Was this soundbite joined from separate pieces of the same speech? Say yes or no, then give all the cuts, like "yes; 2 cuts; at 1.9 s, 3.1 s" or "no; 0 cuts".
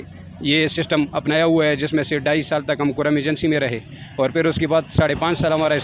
no; 0 cuts